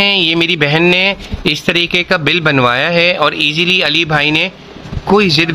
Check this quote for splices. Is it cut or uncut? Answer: uncut